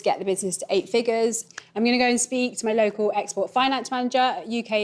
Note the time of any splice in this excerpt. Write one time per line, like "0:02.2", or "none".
0:01.5